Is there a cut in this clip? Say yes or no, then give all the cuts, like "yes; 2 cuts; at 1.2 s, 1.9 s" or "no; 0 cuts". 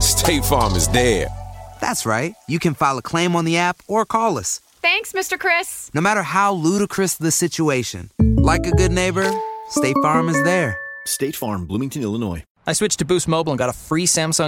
yes; 1 cut; at 12.5 s